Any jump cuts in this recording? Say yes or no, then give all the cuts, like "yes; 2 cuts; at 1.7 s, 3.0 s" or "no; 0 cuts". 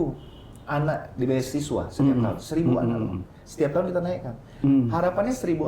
no; 0 cuts